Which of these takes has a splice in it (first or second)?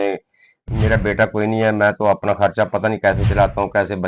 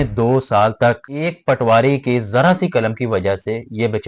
second